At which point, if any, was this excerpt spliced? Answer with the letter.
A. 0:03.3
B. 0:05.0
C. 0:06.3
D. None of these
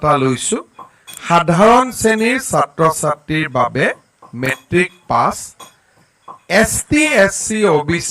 D